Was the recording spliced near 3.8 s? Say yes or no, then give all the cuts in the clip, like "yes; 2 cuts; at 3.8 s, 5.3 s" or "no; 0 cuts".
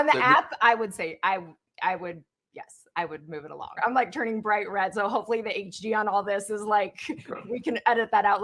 yes; 1 cut; at 3.8 s